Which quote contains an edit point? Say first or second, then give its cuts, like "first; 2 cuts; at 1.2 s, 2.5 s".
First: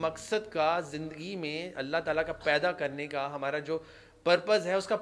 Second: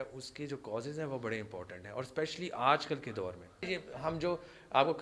second; 1 cut; at 3.7 s